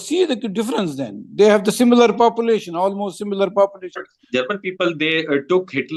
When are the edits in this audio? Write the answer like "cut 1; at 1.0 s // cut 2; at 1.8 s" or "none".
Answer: cut 1; at 4.1 s